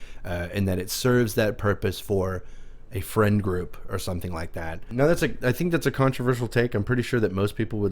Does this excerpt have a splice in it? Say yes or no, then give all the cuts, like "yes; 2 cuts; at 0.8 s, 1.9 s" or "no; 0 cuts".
yes; 1 cut; at 4.8 s